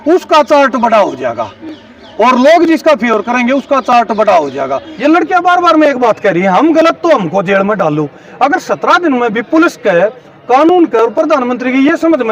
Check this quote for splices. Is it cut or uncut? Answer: cut